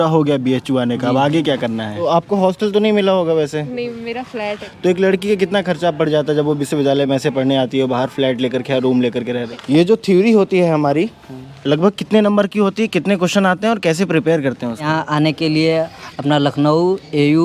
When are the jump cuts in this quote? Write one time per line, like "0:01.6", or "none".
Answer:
0:02.0
0:04.7
0:09.5
0:14.9